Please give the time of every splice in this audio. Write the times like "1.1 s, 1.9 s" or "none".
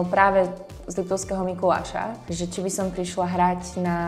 2.2 s